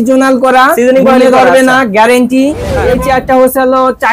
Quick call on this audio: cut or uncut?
cut